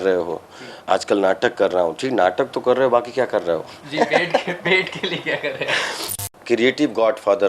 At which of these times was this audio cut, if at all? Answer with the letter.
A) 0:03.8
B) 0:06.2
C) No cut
B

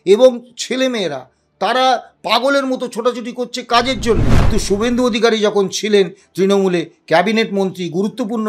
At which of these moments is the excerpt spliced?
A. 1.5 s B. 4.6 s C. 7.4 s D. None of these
B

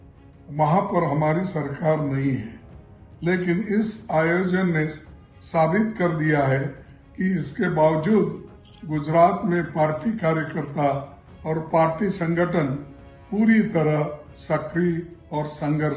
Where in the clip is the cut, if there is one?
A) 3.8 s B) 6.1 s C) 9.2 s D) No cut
D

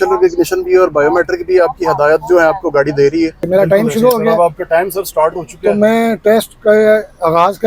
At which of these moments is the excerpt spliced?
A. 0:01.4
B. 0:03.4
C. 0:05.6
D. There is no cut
B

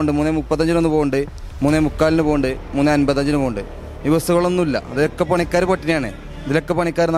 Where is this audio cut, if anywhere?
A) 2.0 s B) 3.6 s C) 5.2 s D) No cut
D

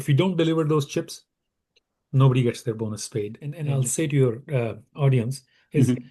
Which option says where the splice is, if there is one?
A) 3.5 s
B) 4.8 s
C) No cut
A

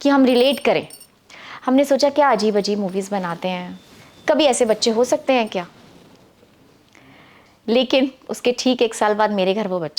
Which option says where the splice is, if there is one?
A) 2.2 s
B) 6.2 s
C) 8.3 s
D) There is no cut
D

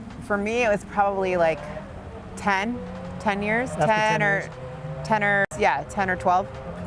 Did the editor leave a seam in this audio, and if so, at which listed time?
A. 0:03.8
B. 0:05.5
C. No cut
B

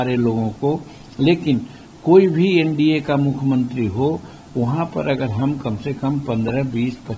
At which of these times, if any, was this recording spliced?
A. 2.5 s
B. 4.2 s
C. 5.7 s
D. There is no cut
D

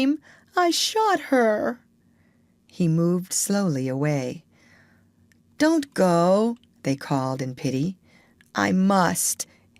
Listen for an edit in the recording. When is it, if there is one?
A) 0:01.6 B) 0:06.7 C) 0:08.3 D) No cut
C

